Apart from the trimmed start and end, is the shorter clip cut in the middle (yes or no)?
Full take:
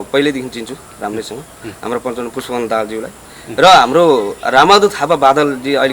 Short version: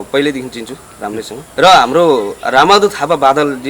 yes